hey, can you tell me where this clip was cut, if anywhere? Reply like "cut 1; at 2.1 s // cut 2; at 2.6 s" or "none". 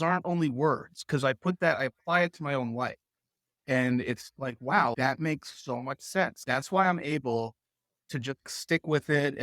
cut 1; at 3.6 s // cut 2; at 4.9 s // cut 3; at 6.4 s // cut 4; at 8.4 s